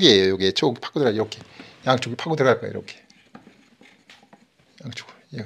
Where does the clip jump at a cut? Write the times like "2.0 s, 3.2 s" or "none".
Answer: none

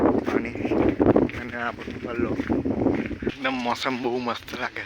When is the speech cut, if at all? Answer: 3.2 s

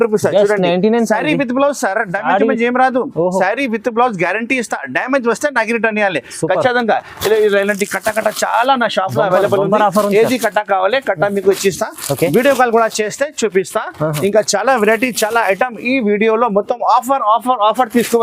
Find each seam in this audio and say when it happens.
none

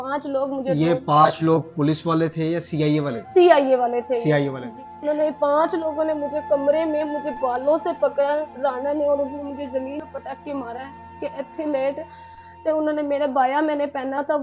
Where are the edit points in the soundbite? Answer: 4.8 s, 10.0 s

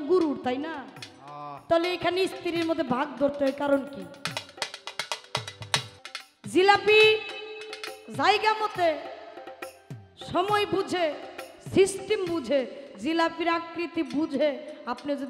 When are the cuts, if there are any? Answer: 5.9 s

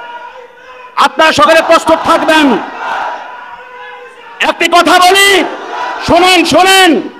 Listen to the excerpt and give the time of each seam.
none

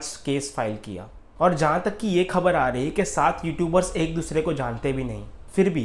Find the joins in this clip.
none

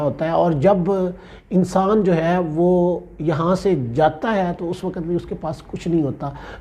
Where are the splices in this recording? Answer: none

